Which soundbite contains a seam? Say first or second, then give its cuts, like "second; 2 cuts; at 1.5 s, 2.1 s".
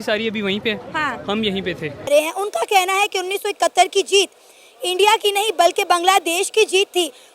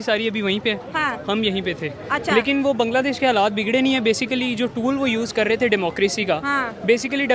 first; 1 cut; at 2.1 s